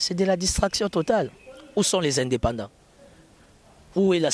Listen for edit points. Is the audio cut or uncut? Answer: uncut